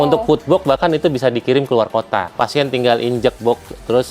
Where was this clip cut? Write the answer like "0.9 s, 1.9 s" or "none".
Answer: 2.3 s

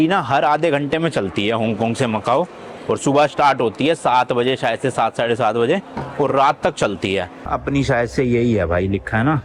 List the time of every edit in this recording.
7.5 s

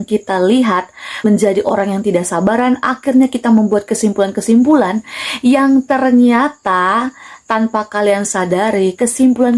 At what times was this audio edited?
1.2 s

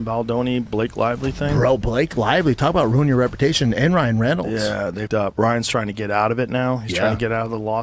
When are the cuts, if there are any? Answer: none

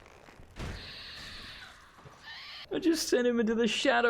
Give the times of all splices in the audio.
2.6 s

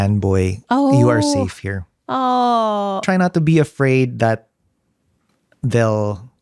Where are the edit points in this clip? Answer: 3.0 s

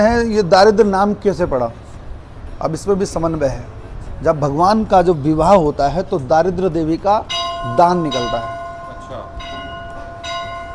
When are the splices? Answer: none

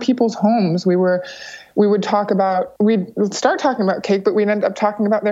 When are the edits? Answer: 2.7 s

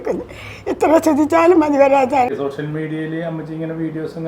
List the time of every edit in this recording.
2.3 s

